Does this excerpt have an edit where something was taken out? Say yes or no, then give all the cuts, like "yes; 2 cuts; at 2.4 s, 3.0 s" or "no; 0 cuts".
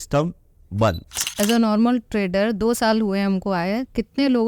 yes; 1 cut; at 1.1 s